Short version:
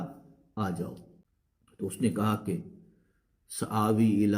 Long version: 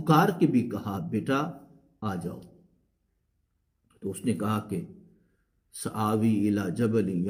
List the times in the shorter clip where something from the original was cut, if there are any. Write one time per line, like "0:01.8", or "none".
0:01.8